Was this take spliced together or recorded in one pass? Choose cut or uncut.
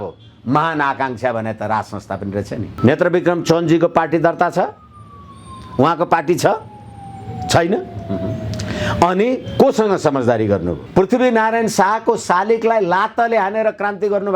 cut